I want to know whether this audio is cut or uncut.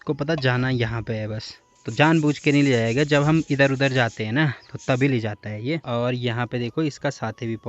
uncut